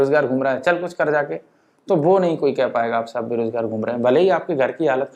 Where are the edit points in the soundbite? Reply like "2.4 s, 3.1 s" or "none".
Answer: none